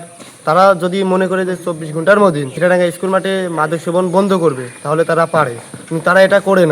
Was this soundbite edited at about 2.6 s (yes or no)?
yes